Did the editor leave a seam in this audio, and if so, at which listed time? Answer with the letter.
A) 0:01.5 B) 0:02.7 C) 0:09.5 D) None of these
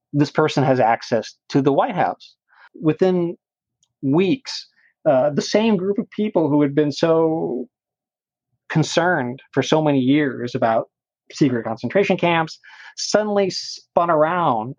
B